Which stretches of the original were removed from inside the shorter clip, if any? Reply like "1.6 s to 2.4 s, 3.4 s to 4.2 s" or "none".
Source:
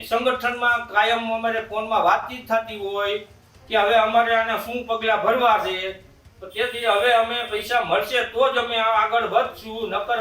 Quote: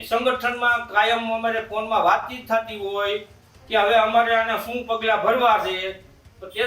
none

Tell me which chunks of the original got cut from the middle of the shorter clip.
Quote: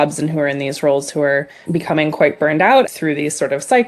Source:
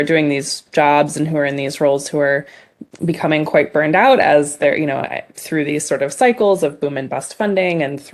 2.5 s to 2.9 s, 4.2 s to 5.4 s

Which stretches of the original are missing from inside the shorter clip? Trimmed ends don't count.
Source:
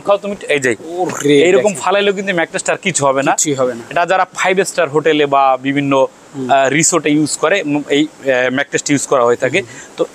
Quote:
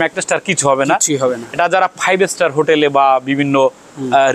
none

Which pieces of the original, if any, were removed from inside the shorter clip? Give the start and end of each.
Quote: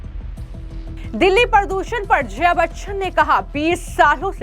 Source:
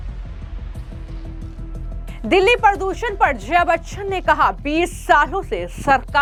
1.5 s to 2.2 s

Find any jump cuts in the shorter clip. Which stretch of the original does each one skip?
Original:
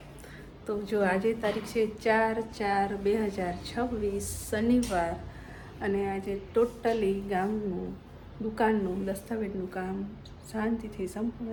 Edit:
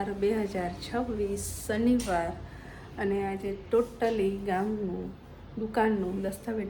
none

